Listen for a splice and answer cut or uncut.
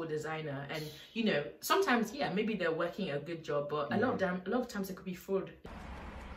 uncut